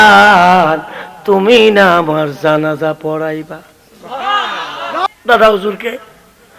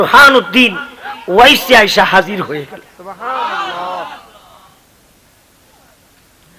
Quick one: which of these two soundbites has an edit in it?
first; 1 cut; at 5.1 s

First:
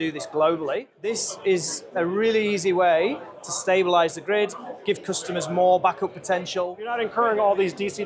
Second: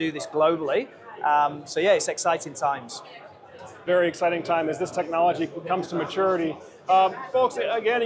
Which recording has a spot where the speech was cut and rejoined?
first; 2 cuts; at 1.0 s, 6.8 s

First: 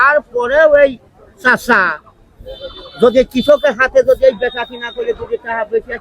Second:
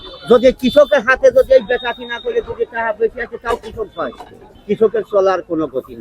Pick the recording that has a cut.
second; 1 cut; at 4.4 s

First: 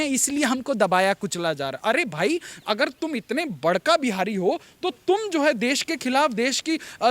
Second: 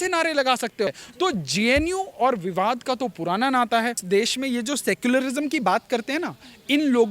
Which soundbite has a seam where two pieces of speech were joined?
second; 2 cuts; at 1.0 s, 4.0 s

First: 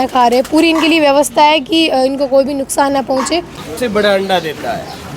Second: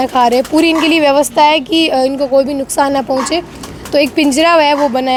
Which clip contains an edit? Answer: first; 1 cut; at 3.6 s

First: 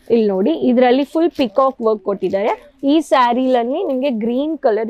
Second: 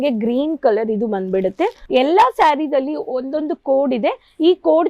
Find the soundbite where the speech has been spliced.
second; 1 cut; at 1.8 s

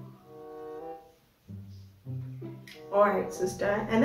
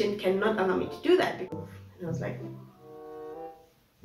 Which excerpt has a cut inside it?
second; 1 cut; at 1.5 s

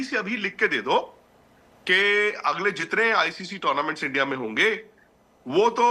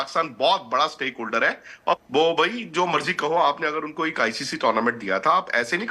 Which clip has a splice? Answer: second; 1 cut; at 2.0 s

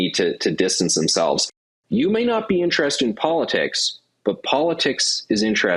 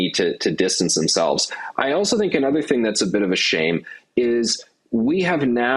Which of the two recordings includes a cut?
first; 1 cut; at 1.6 s

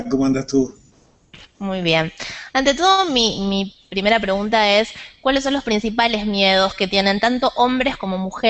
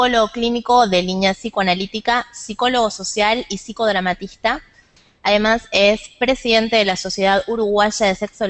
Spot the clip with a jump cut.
first; 1 cut; at 3.9 s

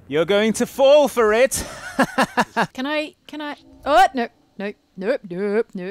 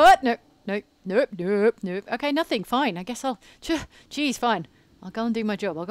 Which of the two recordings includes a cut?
first; 1 cut; at 2.7 s

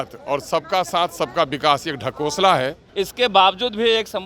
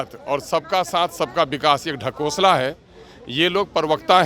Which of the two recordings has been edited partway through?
first; 1 cut; at 2.8 s

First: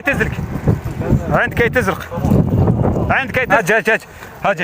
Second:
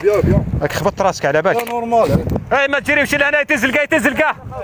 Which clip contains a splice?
first; 1 cut; at 3.6 s

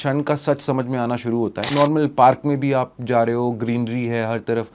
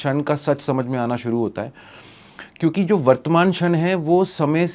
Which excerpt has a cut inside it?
first; 1 cut; at 1.6 s

